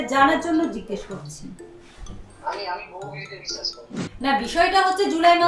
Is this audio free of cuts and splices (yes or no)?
no